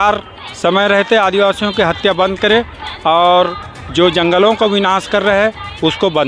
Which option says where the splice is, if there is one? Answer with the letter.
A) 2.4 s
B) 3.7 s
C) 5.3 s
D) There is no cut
D